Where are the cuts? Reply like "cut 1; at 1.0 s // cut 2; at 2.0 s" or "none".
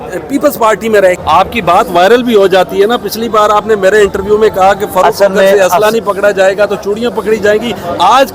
cut 1; at 1.2 s